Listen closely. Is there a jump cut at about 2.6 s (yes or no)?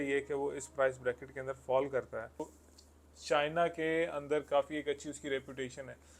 yes